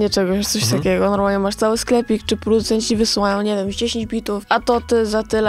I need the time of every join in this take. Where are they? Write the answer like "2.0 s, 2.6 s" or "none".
4.4 s